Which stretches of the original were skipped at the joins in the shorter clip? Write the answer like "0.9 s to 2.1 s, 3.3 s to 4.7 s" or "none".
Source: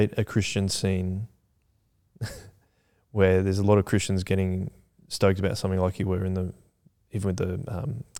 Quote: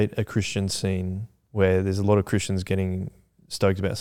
1.3 s to 2.9 s

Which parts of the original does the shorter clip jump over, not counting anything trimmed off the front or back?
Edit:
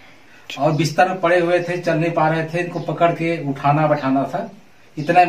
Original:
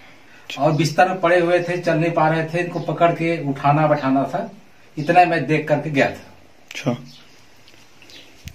none

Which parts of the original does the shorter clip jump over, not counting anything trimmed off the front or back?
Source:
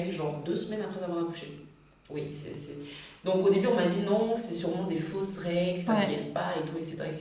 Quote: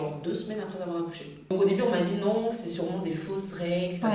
1.7 s to 3.4 s

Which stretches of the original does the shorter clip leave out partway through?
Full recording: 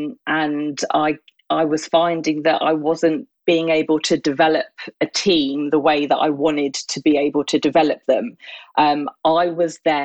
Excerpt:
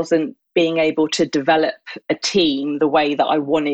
none

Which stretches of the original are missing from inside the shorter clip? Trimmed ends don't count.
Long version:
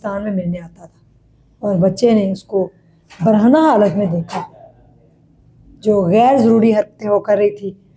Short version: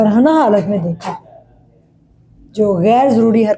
none

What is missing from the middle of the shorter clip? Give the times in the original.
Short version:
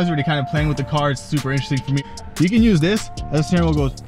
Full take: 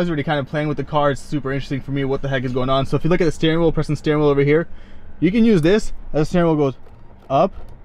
2.0 s to 4.8 s

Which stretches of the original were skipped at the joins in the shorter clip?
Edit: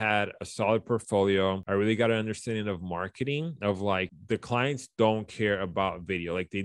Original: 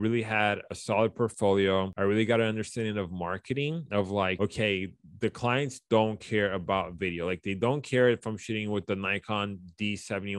4.3 s to 5.0 s

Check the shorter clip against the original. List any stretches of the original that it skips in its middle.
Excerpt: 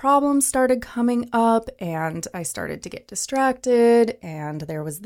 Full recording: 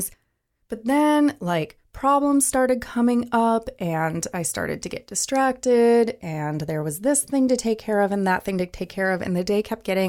none

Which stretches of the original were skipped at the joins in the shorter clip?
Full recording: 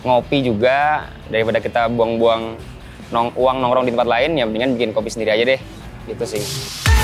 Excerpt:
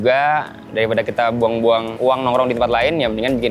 2.5 s to 3.3 s

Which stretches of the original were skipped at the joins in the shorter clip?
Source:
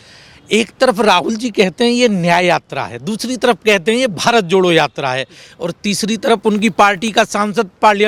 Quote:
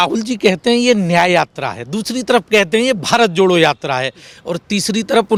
none

